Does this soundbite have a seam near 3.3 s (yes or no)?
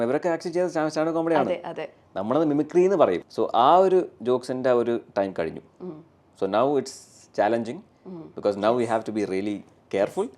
yes